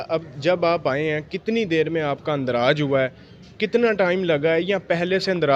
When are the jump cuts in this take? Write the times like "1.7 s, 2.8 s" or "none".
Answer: none